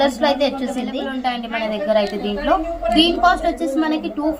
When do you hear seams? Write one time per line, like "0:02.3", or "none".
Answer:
0:01.1

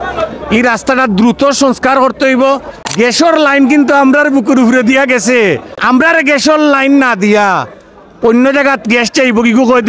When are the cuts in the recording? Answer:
0:02.8
0:05.7

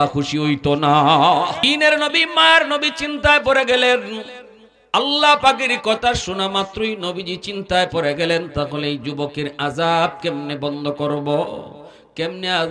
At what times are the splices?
0:01.6

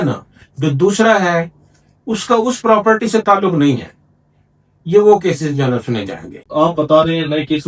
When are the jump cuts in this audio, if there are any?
0:06.4

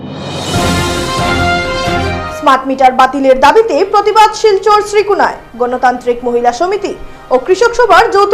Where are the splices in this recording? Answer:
0:02.1

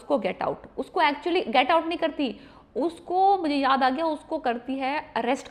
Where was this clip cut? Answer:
none

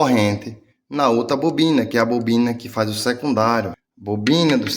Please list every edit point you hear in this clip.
0:03.8

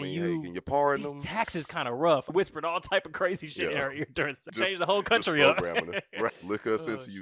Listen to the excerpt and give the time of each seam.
0:02.3
0:04.4
0:06.4

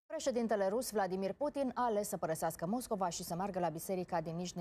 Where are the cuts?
none

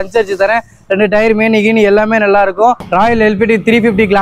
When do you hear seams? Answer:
0:02.8

